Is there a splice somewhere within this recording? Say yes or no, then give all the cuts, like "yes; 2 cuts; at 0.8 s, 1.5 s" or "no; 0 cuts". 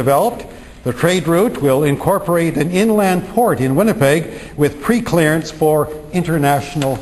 no; 0 cuts